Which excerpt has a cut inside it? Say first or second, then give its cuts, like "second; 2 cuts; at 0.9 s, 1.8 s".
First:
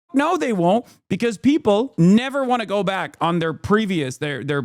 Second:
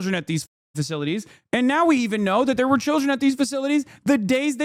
first; 1 cut; at 1.9 s